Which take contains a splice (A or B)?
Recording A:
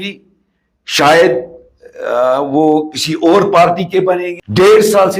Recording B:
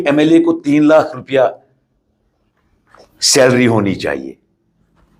A